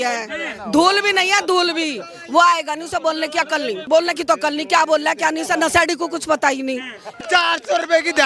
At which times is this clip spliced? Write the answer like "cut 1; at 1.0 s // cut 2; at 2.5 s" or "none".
cut 1; at 3.9 s // cut 2; at 7.0 s